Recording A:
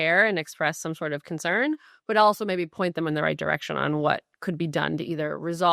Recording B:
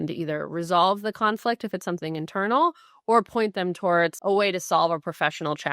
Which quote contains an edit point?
B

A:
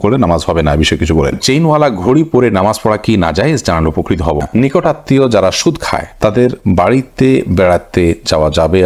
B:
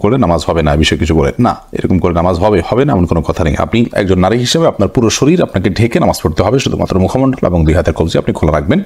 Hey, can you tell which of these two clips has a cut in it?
A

